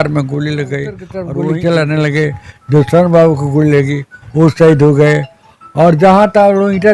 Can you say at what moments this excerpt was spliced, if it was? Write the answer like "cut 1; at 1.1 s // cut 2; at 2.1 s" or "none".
cut 1; at 1.1 s